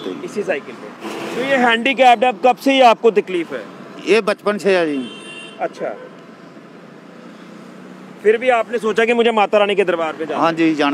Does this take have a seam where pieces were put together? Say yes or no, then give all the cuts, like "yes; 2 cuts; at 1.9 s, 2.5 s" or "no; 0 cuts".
yes; 1 cut; at 1.0 s